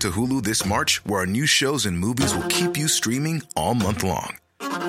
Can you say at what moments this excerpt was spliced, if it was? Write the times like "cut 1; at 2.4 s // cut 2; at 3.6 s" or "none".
none